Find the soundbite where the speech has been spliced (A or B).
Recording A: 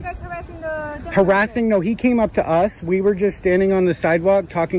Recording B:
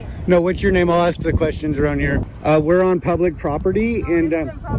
B